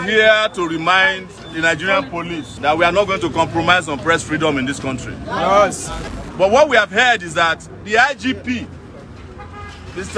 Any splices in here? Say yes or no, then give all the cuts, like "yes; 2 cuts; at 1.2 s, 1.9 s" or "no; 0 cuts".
yes; 3 cuts; at 1.3 s, 2.5 s, 5.9 s